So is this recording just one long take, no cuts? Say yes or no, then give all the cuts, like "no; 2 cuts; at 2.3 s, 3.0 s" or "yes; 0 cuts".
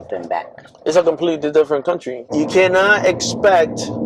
no; 1 cut; at 2.2 s